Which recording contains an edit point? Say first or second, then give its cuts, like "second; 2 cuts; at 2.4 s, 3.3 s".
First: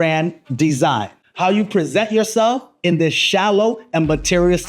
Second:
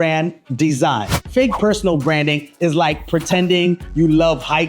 second; 1 cut; at 1.2 s